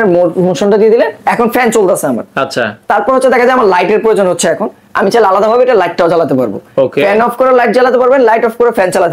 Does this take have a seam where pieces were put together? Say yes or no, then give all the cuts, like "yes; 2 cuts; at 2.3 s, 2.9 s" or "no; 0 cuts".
no; 0 cuts